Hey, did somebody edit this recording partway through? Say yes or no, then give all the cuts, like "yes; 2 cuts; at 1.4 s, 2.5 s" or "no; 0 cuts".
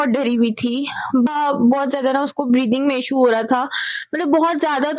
yes; 1 cut; at 1.3 s